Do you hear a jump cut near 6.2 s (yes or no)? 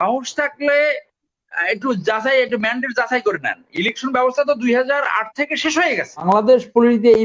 yes